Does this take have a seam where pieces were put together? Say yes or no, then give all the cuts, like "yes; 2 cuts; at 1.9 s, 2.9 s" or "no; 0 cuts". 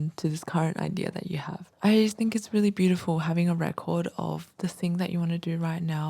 yes; 1 cut; at 1.6 s